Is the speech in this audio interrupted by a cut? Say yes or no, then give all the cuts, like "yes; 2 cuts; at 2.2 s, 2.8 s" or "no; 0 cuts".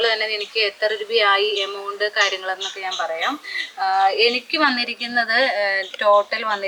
no; 0 cuts